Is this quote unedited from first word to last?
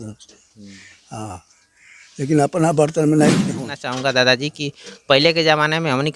no; 1 cut; at 3.8 s

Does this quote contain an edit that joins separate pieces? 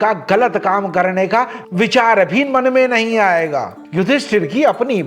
no; 0 cuts

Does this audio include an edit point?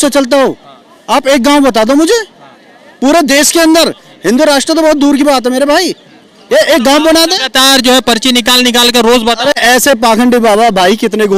no; 0 cuts

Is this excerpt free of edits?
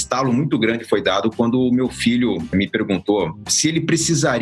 no; 2 cuts; at 2.5 s, 3.4 s

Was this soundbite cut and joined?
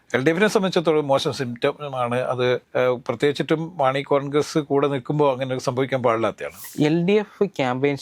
yes; 2 cuts; at 2.6 s, 6.5 s

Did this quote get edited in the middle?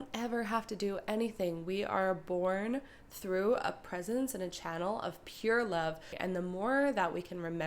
yes; 1 cut; at 6.1 s

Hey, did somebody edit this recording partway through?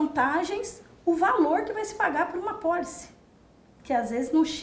no; 0 cuts

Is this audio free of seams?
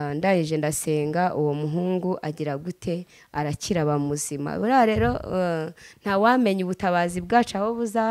yes; 0 cuts

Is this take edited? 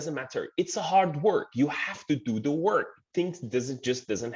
no; 0 cuts

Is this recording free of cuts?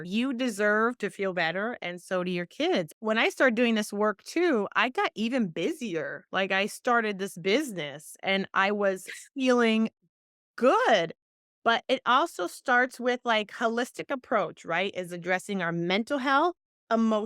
yes; 0 cuts

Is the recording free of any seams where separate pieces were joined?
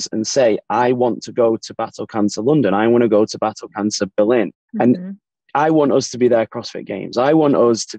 no; 2 cuts; at 4.6 s, 5.5 s

